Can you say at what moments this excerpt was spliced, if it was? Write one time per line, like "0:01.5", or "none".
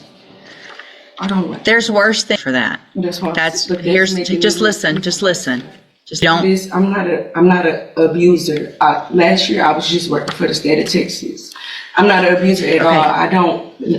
0:02.4
0:06.2